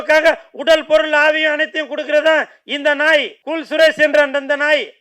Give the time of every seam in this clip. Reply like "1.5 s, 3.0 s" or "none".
3.4 s